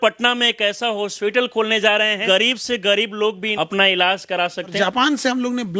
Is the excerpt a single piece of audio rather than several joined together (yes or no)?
no